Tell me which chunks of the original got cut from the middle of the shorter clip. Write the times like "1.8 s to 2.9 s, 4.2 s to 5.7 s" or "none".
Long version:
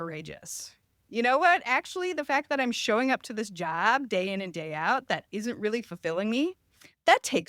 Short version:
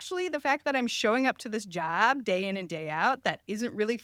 none